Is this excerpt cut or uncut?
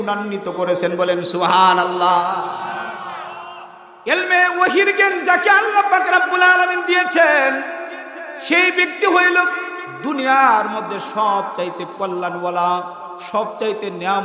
uncut